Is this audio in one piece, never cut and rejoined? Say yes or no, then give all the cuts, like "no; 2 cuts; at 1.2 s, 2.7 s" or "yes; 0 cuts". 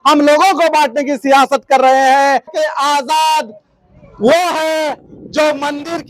no; 1 cut; at 2.5 s